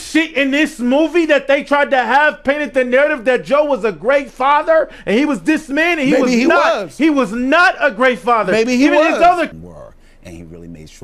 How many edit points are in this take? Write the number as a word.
one